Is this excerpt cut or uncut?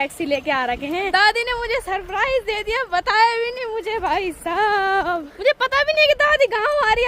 cut